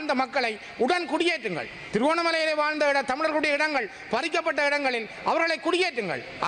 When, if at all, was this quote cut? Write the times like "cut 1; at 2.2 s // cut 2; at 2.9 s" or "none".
none